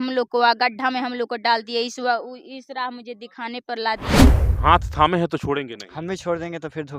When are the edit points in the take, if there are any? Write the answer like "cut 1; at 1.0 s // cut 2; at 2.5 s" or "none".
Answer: cut 1; at 4.3 s